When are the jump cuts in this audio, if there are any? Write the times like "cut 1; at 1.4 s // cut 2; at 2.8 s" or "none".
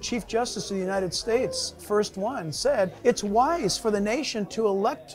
cut 1; at 2.9 s